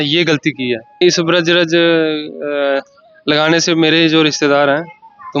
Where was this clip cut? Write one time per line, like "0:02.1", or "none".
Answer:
0:01.0